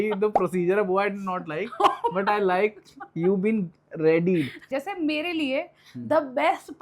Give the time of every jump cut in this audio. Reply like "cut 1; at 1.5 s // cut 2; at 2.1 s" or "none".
cut 1; at 4.6 s